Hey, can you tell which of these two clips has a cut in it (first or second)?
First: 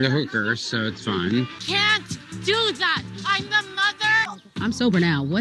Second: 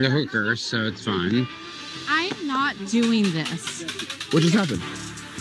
first